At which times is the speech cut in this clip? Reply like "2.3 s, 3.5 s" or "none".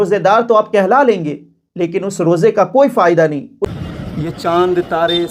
3.6 s